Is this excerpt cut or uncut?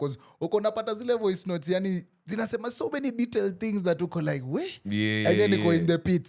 uncut